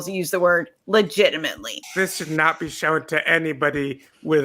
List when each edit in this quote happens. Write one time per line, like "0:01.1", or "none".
0:01.7